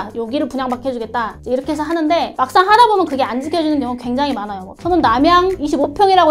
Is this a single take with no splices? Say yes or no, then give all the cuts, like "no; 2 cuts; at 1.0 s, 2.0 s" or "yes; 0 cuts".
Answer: no; 1 cut; at 4.7 s